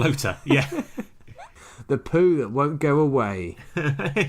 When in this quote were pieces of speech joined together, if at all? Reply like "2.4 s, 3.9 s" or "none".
1.4 s